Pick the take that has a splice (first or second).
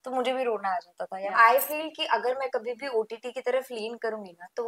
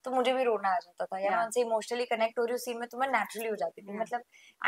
first